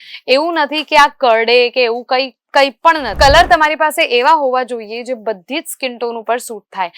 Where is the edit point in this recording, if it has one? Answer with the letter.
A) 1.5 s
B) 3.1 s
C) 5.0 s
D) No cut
B